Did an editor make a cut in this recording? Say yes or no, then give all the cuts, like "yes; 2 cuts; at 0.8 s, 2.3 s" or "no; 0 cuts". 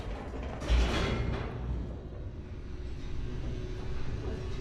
no; 0 cuts